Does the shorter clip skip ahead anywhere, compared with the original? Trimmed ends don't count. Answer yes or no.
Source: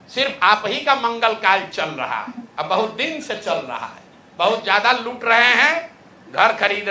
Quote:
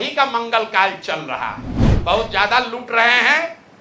yes